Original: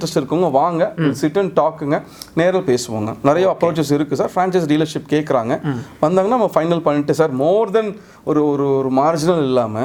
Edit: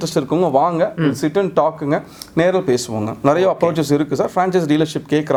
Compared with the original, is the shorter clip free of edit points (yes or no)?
yes